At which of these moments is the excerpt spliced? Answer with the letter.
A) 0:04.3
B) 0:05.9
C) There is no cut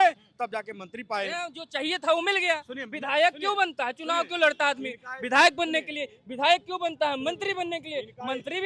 C